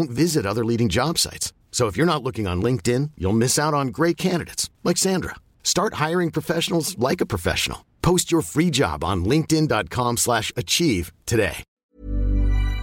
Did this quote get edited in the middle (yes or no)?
yes